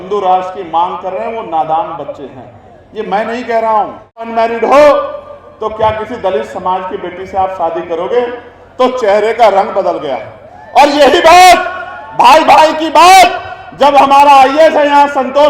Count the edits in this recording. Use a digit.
1